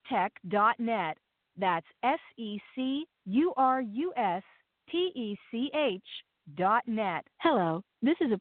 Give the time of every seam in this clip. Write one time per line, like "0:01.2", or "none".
none